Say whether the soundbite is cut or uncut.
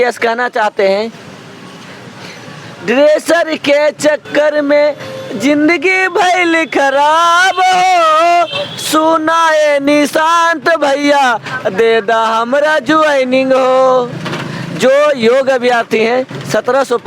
uncut